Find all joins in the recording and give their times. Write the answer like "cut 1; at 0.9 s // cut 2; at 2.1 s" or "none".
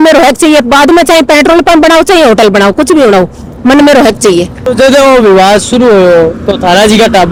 none